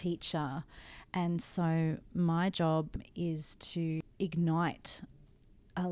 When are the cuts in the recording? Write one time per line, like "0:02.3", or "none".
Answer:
0:03.0
0:04.0